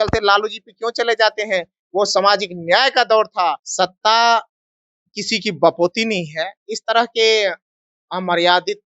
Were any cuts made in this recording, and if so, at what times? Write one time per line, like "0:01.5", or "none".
0:03.6